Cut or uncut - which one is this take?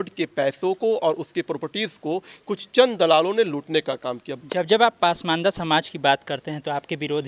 cut